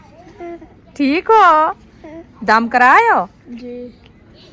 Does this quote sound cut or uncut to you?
uncut